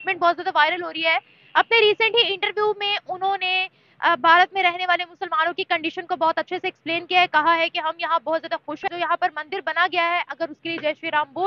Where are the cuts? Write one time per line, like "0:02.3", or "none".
0:08.9